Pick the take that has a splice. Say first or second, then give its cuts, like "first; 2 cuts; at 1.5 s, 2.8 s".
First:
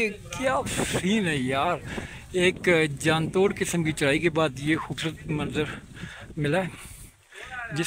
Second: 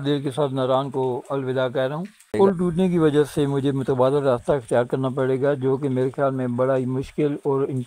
second; 1 cut; at 2.3 s